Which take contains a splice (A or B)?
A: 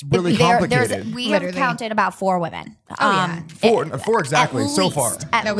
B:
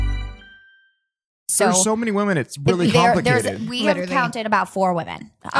B